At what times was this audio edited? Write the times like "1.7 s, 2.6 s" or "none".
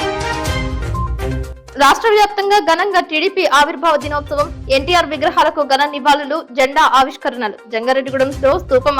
0.9 s, 1.5 s